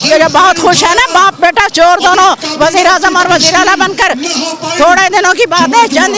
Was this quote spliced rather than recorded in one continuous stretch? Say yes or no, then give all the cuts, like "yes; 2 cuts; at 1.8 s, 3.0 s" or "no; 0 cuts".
no; 0 cuts